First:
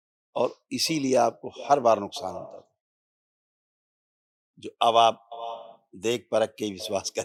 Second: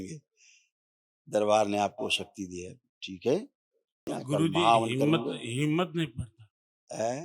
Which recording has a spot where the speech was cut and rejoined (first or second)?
second